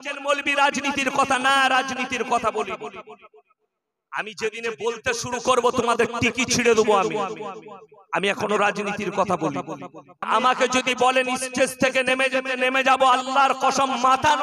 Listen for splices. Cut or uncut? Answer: cut